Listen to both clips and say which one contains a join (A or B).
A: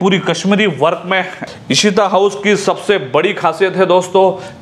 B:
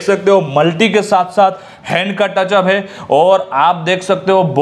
A